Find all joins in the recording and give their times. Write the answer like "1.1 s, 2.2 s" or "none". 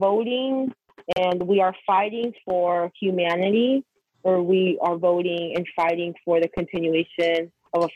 none